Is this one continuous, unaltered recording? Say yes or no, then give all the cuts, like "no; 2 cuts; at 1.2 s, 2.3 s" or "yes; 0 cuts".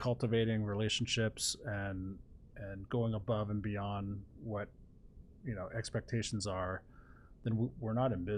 yes; 0 cuts